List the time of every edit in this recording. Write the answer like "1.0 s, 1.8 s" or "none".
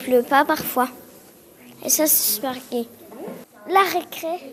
3.5 s